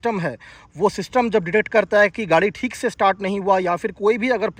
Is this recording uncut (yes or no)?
yes